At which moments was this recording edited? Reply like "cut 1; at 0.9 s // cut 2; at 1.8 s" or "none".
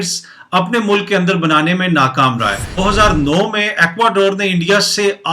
cut 1; at 2.8 s